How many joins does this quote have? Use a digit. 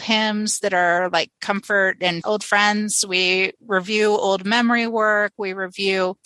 1